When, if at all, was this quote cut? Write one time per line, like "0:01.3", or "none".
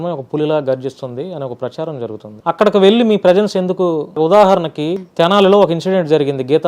0:02.3
0:04.1
0:05.0